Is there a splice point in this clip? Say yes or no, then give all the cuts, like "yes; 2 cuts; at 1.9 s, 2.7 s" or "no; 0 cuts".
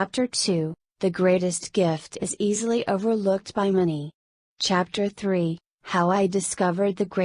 yes; 1 cut; at 4.1 s